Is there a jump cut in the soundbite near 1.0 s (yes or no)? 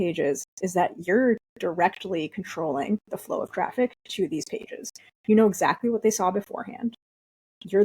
yes